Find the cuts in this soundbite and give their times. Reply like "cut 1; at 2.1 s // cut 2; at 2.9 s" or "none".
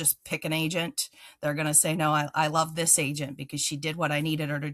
none